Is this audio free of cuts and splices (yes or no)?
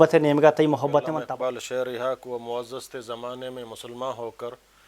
no